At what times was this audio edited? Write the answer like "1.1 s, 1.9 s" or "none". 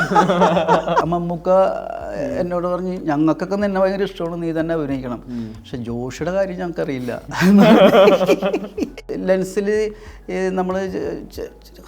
1.0 s, 9.1 s